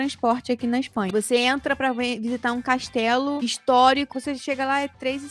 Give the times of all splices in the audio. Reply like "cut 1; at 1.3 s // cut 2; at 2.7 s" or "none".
cut 1; at 1.1 s // cut 2; at 4.1 s